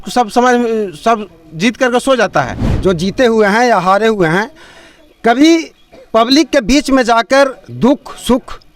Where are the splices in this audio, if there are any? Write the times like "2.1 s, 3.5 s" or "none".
2.6 s